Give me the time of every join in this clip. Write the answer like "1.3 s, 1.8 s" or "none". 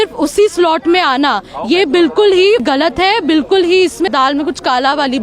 2.6 s, 4.1 s